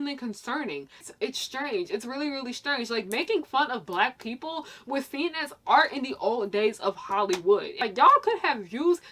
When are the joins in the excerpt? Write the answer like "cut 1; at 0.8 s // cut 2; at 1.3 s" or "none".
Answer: cut 1; at 1.1 s // cut 2; at 7.7 s